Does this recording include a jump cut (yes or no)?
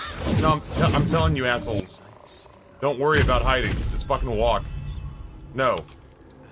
no